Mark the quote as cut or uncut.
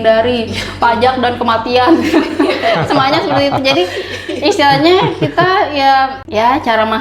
uncut